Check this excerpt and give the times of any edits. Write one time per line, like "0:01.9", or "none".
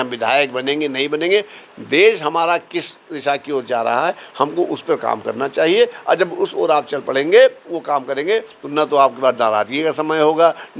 none